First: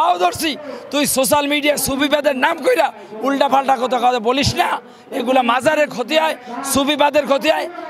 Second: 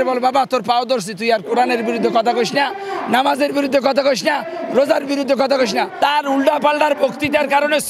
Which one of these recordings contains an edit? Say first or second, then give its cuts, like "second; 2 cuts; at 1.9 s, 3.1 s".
second; 1 cut; at 5.9 s